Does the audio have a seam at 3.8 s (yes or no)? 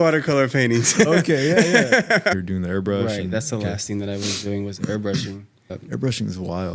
no